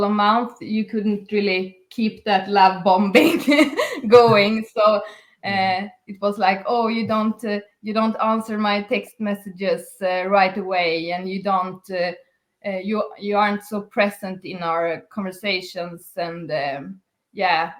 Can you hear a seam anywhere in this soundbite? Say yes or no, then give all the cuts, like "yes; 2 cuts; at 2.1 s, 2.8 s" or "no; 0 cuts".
no; 0 cuts